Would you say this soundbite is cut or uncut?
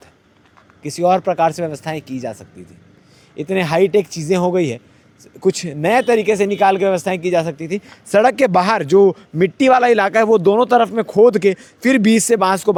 uncut